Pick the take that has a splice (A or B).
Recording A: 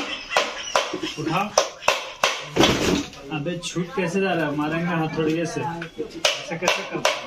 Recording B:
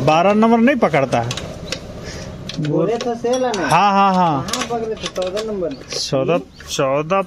B